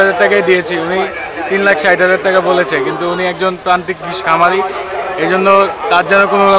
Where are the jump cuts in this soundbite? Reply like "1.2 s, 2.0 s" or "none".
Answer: none